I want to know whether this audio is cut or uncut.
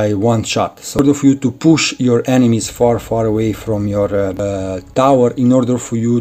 cut